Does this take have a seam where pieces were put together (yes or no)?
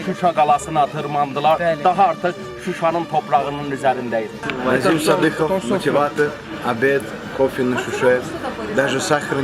yes